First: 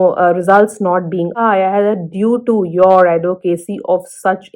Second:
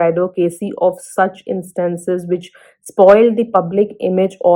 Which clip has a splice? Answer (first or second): first